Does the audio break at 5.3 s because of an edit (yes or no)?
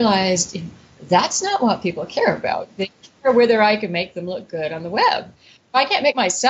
yes